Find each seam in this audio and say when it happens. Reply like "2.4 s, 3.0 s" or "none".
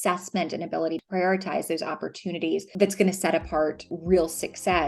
1.0 s, 2.7 s, 3.9 s